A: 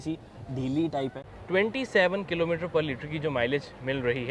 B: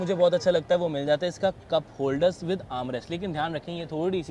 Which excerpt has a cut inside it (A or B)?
A